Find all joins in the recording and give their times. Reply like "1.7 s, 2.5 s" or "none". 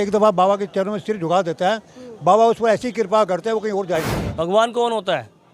4.2 s